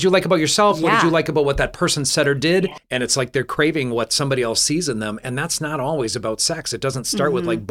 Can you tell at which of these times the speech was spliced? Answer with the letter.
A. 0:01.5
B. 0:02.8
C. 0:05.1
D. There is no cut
B